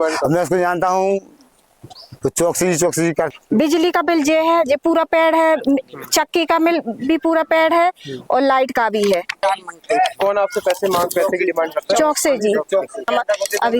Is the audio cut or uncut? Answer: cut